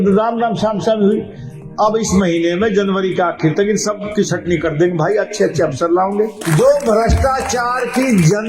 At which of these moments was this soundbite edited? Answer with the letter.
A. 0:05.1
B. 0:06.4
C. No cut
B